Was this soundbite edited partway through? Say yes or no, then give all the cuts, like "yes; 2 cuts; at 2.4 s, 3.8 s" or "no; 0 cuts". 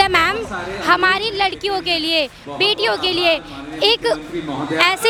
no; 0 cuts